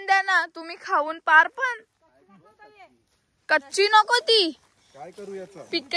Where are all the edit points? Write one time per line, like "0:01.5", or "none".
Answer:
none